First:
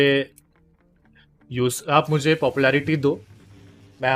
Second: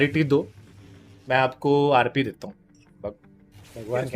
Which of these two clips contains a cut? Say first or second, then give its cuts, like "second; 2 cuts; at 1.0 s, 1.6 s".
second; 1 cut; at 2.8 s